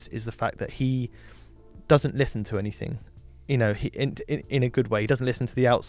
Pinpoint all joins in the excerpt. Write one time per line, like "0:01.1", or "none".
none